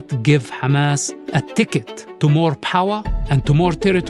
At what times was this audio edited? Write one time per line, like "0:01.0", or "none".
0:01.1
0:02.0